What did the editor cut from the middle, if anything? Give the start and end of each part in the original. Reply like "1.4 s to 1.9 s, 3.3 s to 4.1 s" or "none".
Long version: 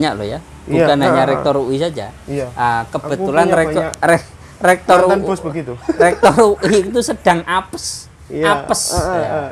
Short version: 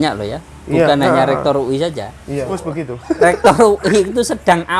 2.5 s to 5.3 s